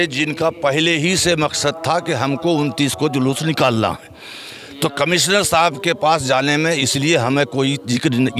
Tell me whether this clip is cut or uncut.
uncut